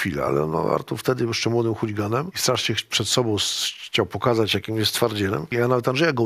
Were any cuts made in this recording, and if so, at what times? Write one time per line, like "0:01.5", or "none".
0:02.3
0:05.5